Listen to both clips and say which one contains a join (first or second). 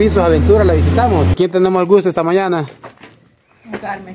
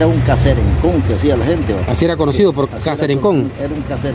first